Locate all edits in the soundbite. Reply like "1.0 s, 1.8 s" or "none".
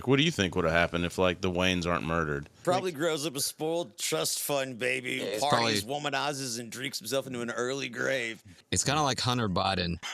2.6 s, 8.6 s